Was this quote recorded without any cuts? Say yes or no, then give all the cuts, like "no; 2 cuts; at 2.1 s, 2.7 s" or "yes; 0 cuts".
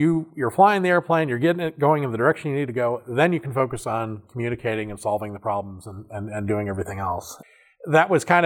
yes; 0 cuts